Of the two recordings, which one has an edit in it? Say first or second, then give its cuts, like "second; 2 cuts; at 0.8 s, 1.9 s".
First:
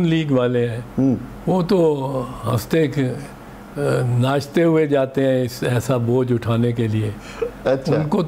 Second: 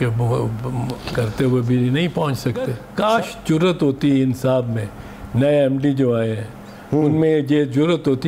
second; 1 cut; at 2.8 s